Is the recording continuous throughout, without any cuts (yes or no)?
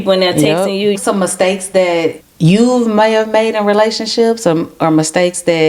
no